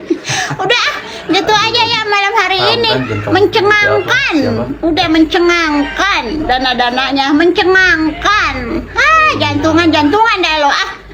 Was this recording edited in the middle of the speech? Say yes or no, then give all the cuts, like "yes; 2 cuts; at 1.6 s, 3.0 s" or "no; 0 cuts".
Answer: no; 0 cuts